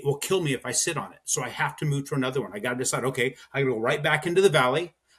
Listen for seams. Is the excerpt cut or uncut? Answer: uncut